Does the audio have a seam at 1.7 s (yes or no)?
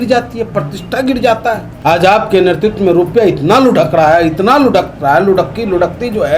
yes